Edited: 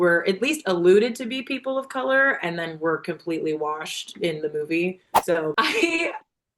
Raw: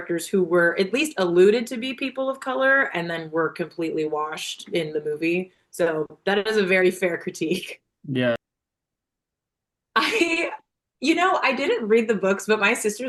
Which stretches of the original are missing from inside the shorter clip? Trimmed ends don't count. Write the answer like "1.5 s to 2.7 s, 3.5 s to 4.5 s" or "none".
6.1 s to 9.9 s

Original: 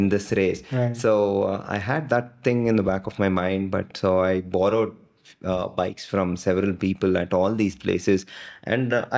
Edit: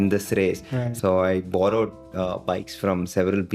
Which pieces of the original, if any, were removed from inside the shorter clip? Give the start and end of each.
0.9 s to 3.9 s, 5.0 s to 5.3 s

